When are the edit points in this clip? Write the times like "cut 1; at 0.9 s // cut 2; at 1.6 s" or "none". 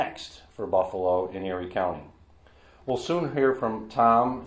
none